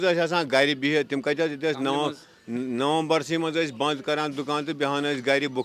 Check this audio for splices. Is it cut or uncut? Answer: uncut